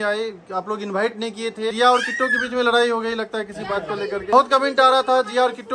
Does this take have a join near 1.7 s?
yes; 2 cuts; at 1.7 s, 4.3 s

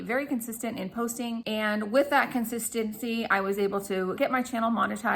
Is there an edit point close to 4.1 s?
yes; 2 cuts; at 1.6 s, 4.1 s

